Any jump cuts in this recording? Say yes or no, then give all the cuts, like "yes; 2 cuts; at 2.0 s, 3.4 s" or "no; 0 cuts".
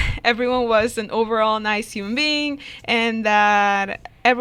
no; 0 cuts